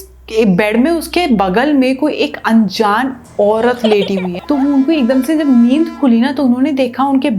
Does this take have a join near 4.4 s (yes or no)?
yes